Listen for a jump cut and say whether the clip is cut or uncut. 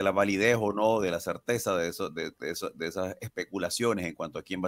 uncut